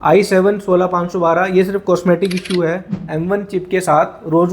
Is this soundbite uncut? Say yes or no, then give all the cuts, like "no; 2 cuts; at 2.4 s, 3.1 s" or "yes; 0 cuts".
no; 1 cut; at 2.9 s